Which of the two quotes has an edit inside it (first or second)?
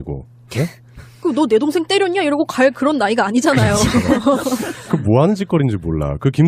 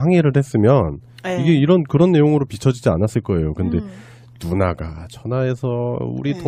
first